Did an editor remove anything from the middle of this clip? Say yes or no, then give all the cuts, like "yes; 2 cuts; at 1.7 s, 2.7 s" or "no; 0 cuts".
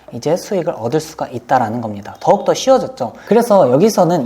yes; 1 cut; at 3.1 s